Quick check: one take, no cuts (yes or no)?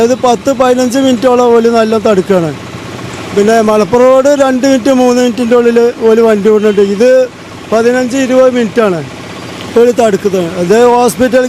yes